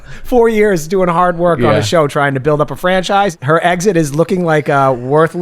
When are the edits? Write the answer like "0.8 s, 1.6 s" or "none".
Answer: 3.4 s